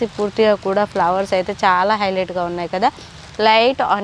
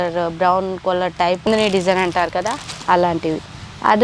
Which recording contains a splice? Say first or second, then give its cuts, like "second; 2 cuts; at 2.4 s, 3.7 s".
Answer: second; 1 cut; at 1.5 s